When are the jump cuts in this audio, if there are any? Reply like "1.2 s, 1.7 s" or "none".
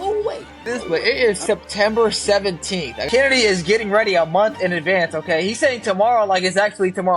1.0 s, 2.9 s